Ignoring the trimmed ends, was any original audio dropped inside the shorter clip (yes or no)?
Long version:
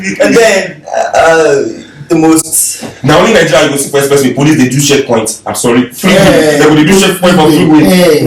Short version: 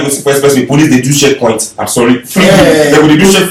no